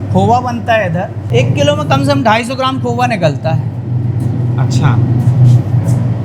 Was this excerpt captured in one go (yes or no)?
no